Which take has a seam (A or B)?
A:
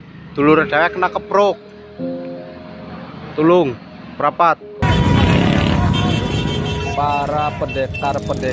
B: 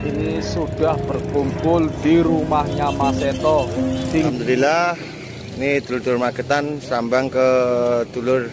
B